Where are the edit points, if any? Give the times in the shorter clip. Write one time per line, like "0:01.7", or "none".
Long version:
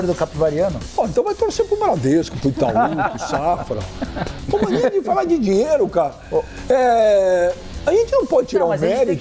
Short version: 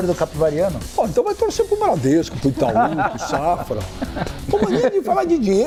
none